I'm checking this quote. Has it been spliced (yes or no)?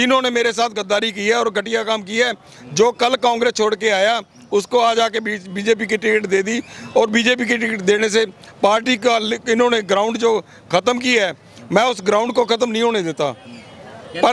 no